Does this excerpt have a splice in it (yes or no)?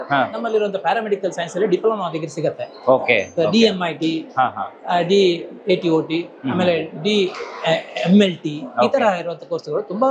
no